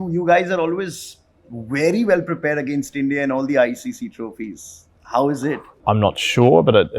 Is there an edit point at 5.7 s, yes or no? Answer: yes